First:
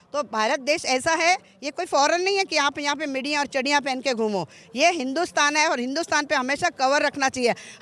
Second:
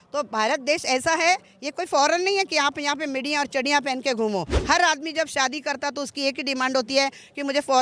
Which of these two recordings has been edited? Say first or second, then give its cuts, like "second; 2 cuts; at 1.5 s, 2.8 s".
second; 1 cut; at 4.5 s